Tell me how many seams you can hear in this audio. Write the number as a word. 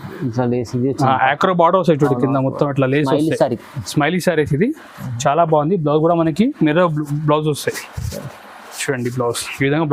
zero